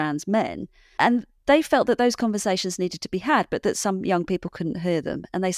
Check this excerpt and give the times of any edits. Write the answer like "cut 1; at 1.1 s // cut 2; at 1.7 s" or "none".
none